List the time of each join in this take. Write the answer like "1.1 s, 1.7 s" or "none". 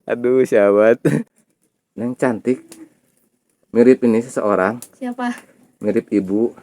1.3 s